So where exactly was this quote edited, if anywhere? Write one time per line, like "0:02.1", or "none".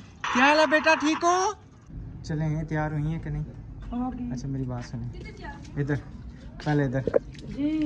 0:01.9